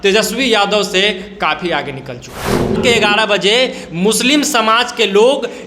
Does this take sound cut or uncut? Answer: cut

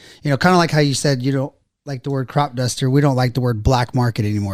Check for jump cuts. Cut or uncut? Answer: uncut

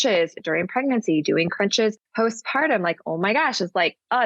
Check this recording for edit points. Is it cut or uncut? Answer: cut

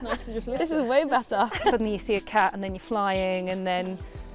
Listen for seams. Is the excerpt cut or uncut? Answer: cut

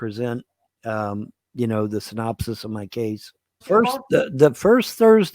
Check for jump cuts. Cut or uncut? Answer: cut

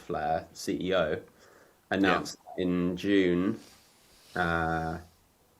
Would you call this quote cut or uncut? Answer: uncut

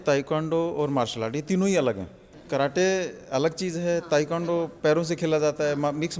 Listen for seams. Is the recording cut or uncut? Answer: uncut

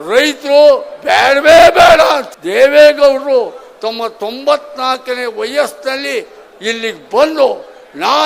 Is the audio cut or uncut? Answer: cut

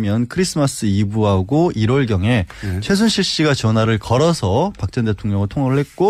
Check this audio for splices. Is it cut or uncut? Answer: uncut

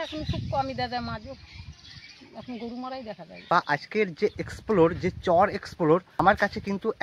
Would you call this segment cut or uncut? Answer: cut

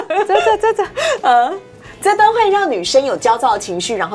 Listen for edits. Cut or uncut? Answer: uncut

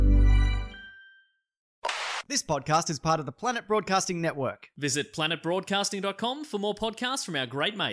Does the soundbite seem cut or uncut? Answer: cut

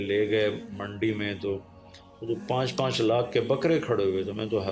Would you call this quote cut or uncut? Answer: uncut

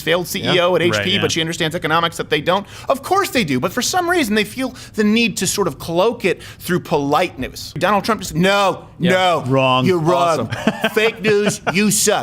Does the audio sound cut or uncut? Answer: cut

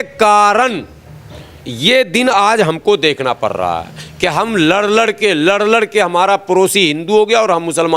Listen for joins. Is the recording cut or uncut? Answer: uncut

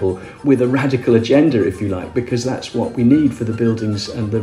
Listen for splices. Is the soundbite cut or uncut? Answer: uncut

